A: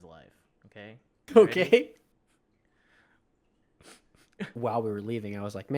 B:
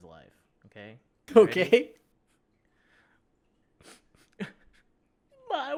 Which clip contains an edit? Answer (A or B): A